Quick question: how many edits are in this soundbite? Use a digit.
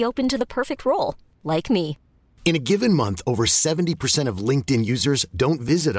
0